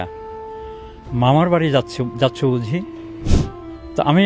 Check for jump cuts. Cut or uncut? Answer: cut